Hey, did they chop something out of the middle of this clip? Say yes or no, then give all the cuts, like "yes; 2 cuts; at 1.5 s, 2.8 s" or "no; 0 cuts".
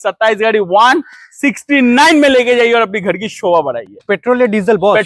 no; 0 cuts